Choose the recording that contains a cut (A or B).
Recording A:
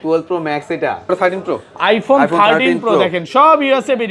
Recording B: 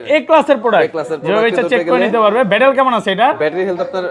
A